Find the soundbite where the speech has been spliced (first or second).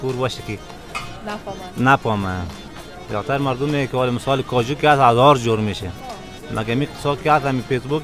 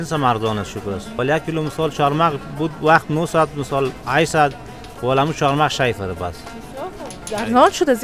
second